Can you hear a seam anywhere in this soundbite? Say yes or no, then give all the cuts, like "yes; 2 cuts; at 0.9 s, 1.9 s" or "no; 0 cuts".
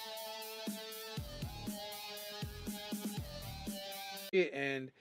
no; 0 cuts